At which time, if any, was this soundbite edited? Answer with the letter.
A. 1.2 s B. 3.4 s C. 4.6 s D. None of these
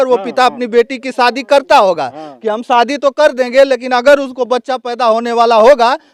D